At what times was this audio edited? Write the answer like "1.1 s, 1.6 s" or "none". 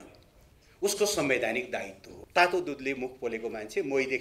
2.1 s